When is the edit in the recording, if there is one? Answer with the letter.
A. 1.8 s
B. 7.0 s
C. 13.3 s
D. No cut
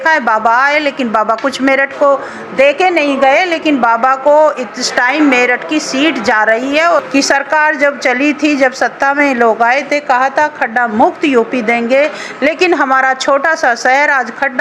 B